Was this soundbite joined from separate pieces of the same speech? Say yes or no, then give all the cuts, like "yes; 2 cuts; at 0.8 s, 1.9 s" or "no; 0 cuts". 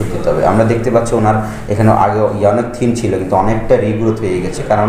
no; 0 cuts